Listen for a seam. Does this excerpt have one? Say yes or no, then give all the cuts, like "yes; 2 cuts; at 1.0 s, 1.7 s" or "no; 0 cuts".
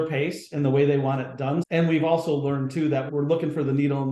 yes; 2 cuts; at 1.7 s, 3.1 s